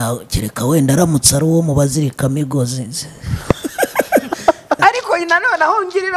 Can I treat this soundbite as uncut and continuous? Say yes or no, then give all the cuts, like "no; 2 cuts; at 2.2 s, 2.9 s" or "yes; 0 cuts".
no; 1 cut; at 4.8 s